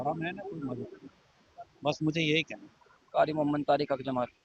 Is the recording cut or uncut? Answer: uncut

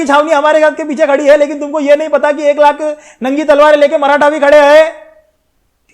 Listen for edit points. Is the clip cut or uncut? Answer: uncut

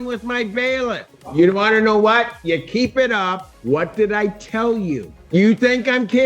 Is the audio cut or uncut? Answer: cut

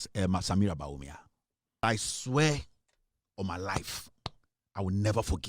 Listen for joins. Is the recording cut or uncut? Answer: cut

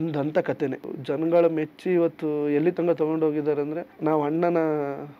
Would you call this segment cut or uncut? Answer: cut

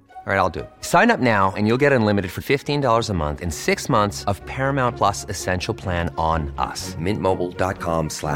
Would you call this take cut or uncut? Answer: uncut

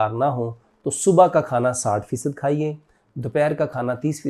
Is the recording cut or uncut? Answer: uncut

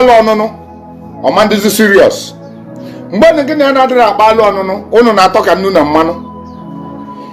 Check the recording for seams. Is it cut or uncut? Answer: uncut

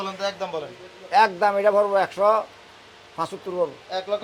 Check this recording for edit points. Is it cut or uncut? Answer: uncut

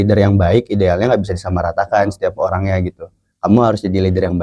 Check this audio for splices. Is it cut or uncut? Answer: uncut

